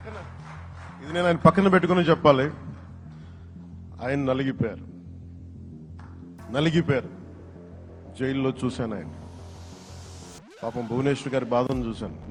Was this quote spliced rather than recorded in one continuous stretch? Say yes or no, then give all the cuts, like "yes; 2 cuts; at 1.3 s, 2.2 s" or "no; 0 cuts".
no; 0 cuts